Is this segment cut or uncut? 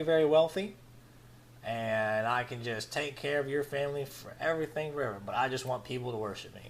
uncut